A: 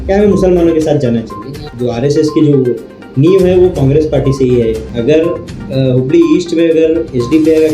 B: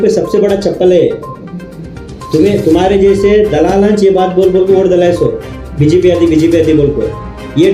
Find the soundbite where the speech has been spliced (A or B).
A